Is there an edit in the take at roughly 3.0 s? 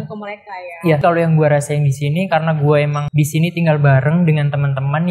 yes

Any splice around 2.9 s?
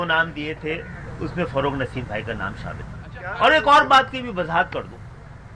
yes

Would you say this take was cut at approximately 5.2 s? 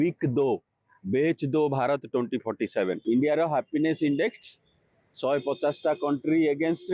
no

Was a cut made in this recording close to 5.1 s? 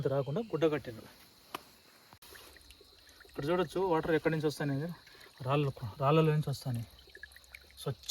no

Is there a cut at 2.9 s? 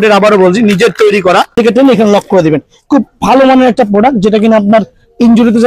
no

